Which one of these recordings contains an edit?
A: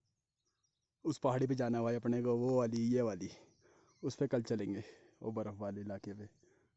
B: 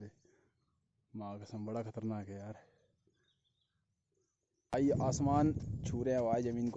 B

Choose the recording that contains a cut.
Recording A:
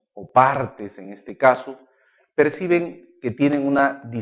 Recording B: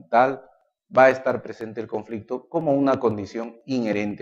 B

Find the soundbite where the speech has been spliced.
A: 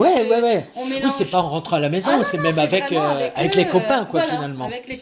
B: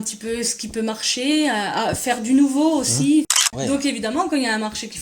B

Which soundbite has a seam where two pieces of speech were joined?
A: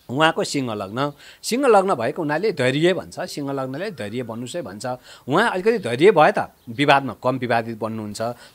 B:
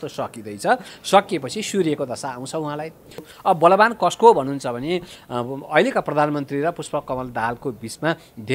B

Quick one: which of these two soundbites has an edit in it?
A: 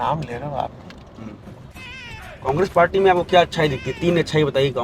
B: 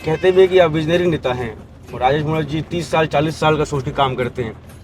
A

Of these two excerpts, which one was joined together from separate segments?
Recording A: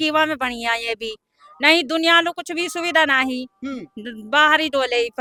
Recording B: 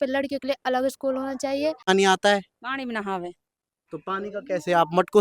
B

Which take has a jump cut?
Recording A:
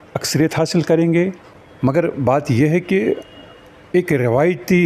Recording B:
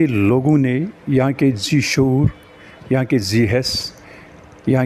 A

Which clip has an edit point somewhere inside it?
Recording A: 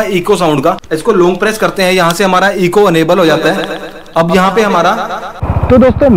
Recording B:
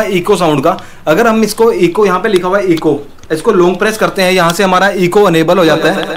A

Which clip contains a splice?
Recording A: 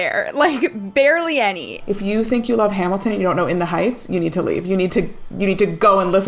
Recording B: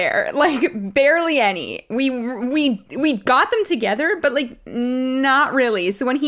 A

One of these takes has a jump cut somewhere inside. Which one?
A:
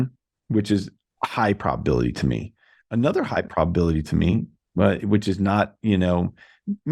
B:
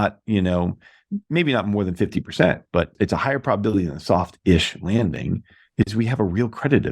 B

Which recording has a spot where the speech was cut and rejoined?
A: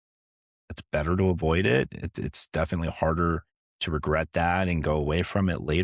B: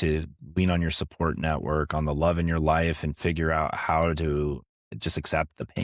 B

